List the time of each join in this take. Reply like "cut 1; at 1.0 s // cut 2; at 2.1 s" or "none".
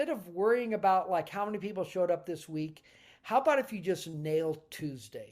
none